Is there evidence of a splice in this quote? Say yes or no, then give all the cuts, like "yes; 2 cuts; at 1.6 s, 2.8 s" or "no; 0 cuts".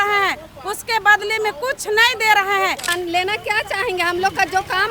yes; 1 cut; at 2.9 s